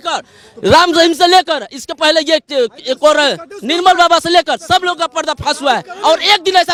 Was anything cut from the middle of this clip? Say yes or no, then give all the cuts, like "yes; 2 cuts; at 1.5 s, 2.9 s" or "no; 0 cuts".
no; 0 cuts